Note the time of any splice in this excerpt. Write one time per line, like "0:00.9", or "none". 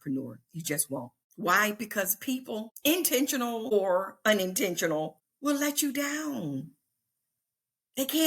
0:01.2
0:02.7
0:03.7
0:05.2

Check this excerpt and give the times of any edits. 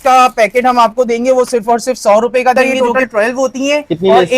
0:02.5

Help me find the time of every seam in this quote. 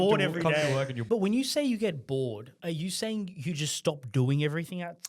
0:01.0
0:02.5

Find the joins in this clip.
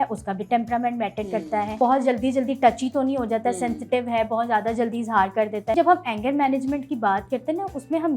0:01.8
0:05.7

